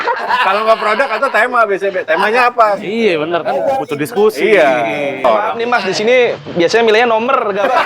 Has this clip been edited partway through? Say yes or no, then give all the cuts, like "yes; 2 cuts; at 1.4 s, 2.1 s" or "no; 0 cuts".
yes; 1 cut; at 5.2 s